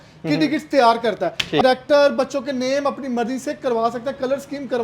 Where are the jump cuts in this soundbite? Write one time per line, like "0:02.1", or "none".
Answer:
0:01.6

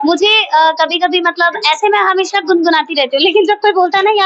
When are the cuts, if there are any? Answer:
none

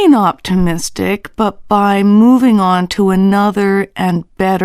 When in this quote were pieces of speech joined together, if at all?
0:01.3

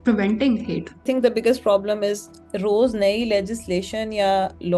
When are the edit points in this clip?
0:01.0
0:02.3

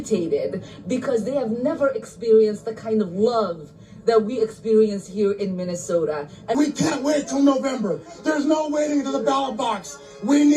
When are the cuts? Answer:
0:06.5

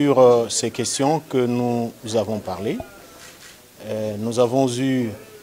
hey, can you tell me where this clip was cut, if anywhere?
none

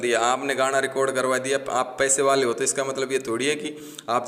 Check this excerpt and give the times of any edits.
none

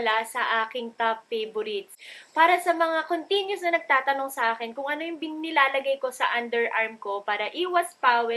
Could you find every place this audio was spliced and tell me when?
0:02.0

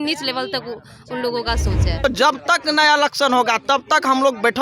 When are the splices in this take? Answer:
0:02.0

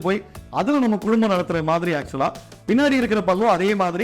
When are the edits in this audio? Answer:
0:02.5

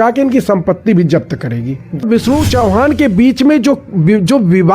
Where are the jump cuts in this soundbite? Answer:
0:02.0

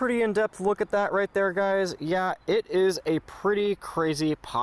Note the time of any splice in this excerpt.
none

